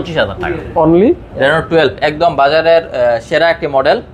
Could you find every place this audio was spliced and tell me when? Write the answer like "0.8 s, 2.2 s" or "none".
1.3 s

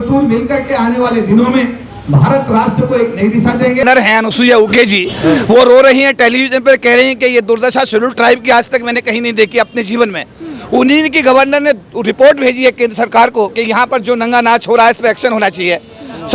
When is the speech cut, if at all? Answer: 3.8 s

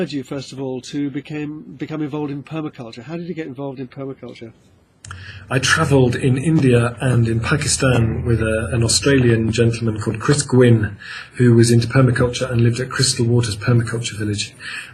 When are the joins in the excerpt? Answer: 3.7 s

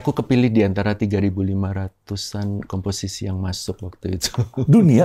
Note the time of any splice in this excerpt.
none

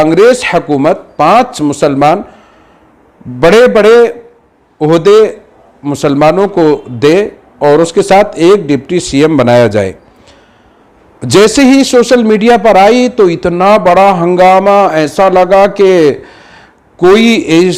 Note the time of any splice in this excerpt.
none

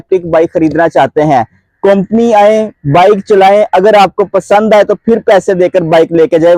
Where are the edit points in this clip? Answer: none

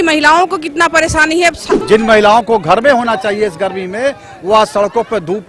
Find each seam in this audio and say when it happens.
1.7 s

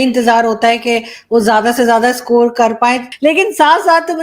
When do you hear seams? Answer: 3.1 s

